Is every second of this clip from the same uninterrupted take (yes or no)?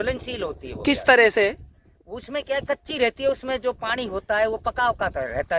yes